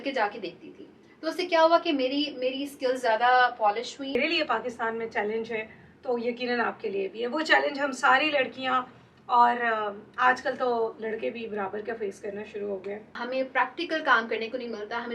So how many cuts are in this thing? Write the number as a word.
two